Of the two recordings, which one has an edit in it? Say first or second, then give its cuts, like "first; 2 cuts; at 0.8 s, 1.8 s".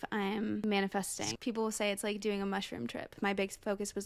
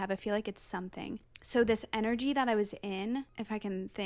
first; 2 cuts; at 1.3 s, 3.2 s